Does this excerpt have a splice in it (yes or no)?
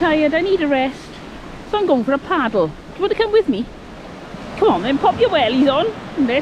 no